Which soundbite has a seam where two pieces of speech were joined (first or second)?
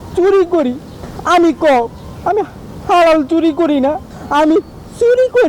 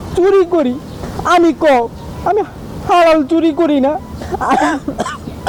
first